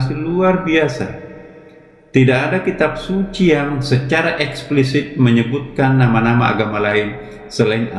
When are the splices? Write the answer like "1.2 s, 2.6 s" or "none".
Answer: none